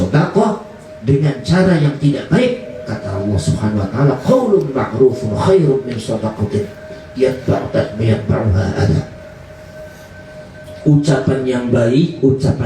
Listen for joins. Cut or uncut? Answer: uncut